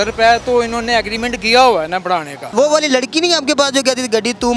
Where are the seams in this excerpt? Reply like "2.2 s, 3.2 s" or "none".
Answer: 2.5 s